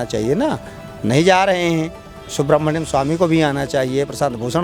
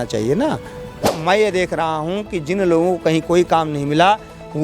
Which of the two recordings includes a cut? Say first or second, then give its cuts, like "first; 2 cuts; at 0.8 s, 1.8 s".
second; 1 cut; at 1.1 s